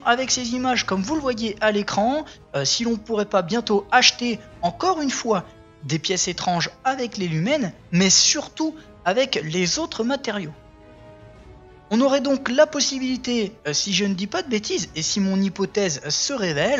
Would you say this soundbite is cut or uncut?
cut